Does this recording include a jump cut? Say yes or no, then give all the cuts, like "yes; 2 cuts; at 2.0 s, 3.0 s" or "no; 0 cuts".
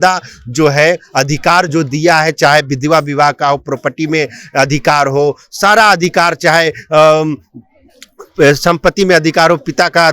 no; 0 cuts